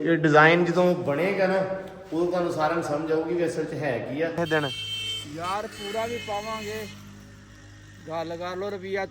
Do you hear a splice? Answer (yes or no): yes